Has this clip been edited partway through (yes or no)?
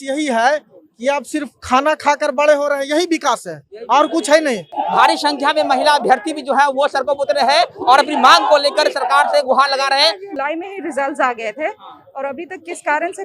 yes